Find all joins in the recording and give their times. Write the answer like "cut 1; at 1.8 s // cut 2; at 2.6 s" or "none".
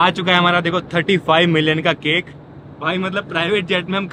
none